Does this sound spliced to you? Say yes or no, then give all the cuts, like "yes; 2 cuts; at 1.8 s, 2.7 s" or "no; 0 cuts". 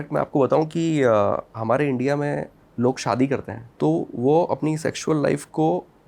yes; 2 cuts; at 2.6 s, 3.6 s